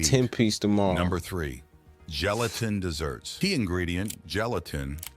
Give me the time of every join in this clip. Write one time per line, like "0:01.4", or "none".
0:03.3